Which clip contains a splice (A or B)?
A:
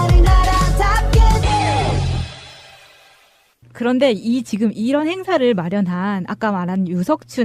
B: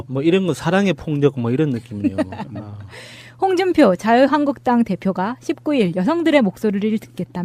A